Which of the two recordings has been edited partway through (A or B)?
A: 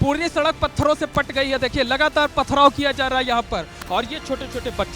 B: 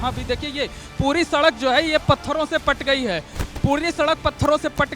A